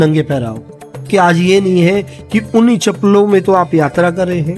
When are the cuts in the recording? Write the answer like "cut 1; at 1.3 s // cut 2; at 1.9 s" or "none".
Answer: cut 1; at 1.1 s